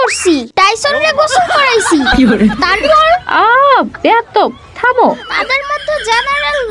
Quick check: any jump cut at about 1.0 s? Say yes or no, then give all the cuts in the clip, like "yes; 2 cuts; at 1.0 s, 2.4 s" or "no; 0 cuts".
no; 1 cut; at 5.3 s